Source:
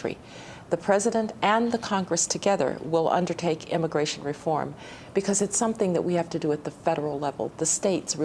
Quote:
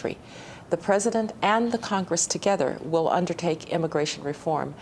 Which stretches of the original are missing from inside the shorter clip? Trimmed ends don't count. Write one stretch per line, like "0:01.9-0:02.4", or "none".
none